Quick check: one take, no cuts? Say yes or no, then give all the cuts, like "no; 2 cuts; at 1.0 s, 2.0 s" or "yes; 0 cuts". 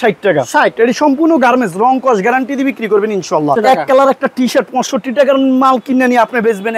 no; 2 cuts; at 0.8 s, 3.6 s